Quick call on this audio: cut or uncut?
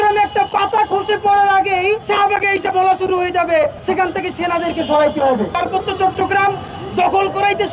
cut